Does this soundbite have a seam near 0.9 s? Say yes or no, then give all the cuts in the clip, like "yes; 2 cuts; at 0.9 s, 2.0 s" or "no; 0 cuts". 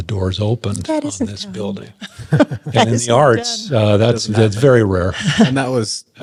no; 0 cuts